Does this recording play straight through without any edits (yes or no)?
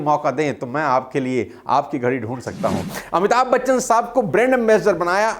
no